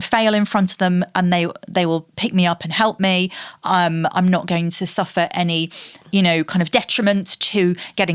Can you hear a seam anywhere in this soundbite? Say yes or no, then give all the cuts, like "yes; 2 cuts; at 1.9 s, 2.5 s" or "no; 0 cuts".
no; 0 cuts